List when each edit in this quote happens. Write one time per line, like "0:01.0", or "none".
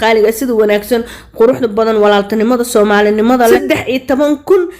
0:03.6